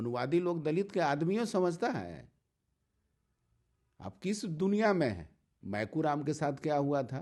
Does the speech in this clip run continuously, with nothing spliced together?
no; 1 cut; at 5.6 s

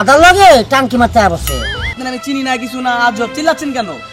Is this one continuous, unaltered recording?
no; 1 cut; at 1.9 s

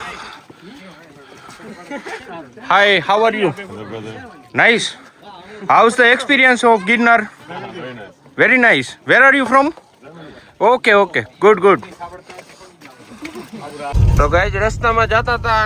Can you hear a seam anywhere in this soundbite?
yes; 1 cut; at 13.9 s

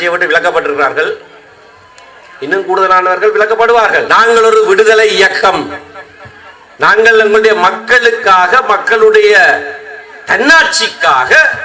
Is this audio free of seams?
no; 1 cut; at 4.1 s

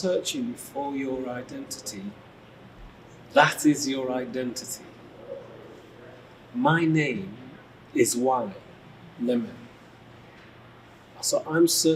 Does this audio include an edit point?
no; 0 cuts

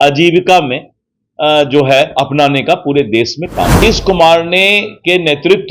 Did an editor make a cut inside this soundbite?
yes; 1 cut; at 3.8 s

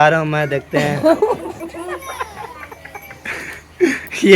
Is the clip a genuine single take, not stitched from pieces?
yes; 0 cuts

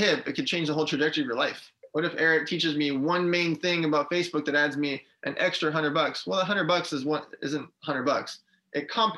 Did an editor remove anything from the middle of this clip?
yes; 1 cut; at 1.8 s

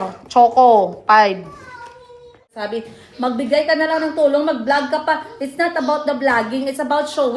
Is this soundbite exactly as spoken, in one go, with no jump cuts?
no; 1 cut; at 2.5 s

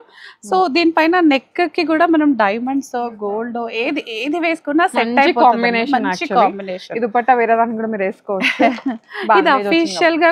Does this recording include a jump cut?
no; 0 cuts

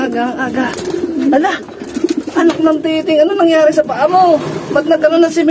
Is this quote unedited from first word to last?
yes; 0 cuts

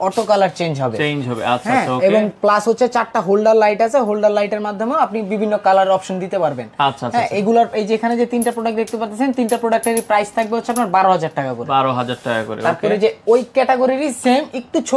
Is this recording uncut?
yes; 0 cuts

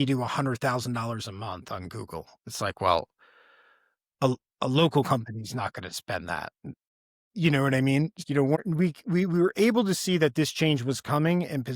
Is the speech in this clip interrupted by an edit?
no; 0 cuts

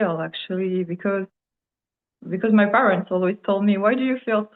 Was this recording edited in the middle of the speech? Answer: no; 0 cuts

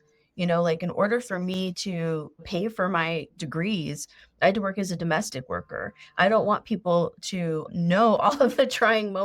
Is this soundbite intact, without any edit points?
no; 3 cuts; at 2.4 s, 3.3 s, 7.7 s

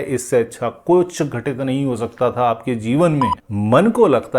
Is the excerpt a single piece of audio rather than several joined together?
no; 1 cut; at 3.4 s

